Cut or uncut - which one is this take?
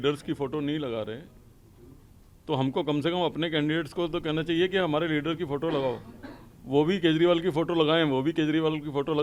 uncut